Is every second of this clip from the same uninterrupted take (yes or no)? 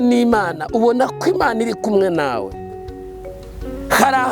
yes